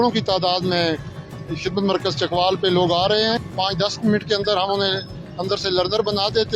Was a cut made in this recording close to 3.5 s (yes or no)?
yes